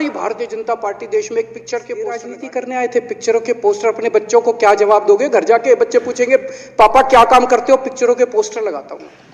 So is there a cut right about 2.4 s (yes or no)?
yes